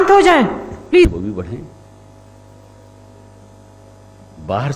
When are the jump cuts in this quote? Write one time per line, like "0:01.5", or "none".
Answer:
0:01.0